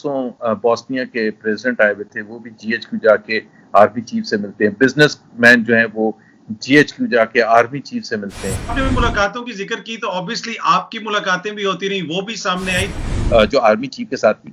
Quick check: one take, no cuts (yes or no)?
no